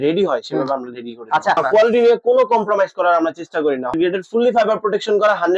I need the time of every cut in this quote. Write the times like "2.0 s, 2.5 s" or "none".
1.6 s, 3.9 s